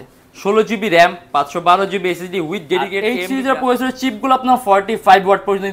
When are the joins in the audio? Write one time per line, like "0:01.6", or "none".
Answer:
0:02.9